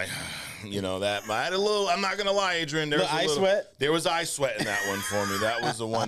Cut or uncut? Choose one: uncut